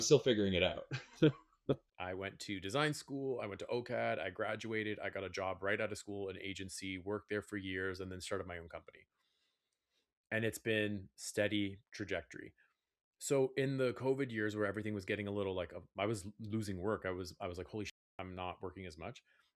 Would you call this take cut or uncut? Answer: uncut